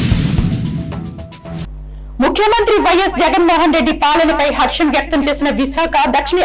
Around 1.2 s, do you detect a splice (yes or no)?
yes